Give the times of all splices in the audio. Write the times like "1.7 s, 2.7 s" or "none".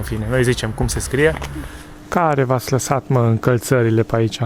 2.0 s